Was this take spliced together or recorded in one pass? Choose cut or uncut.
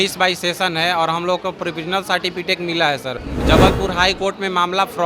cut